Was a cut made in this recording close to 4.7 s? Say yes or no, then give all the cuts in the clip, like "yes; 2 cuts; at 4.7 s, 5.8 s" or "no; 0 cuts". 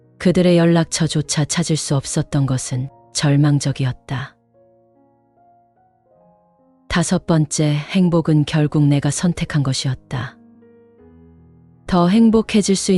yes; 2 cuts; at 4.7 s, 6.9 s